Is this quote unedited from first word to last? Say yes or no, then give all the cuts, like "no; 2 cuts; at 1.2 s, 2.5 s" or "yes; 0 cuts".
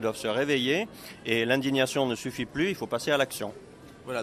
yes; 0 cuts